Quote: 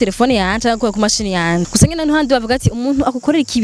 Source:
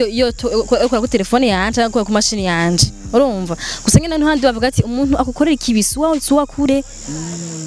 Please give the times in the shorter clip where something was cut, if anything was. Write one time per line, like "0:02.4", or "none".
0:01.7